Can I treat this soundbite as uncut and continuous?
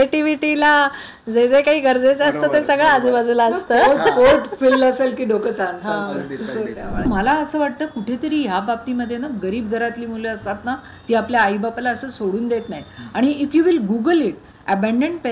no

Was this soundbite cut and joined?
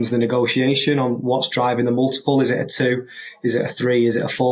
no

